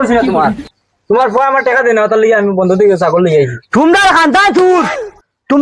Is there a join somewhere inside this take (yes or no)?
no